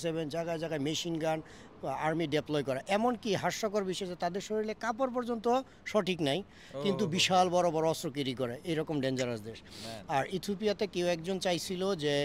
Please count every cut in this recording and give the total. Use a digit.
0